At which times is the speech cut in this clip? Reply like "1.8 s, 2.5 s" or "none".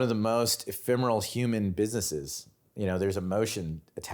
none